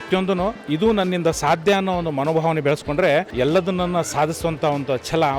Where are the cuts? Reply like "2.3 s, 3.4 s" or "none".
3.3 s